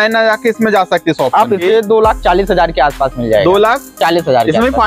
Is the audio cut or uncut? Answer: cut